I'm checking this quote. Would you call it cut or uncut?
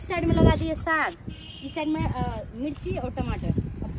uncut